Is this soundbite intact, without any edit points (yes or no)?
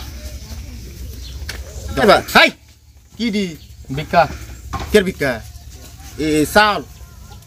no